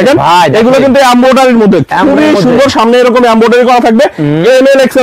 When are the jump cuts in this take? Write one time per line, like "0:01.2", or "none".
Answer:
none